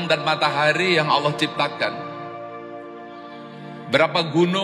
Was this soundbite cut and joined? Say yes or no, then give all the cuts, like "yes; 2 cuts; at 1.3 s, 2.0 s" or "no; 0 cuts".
yes; 2 cuts; at 1.9 s, 3.9 s